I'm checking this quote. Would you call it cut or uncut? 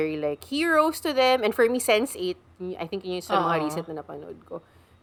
uncut